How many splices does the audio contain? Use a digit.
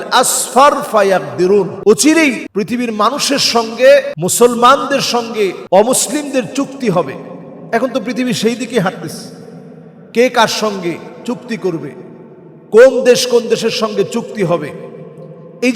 4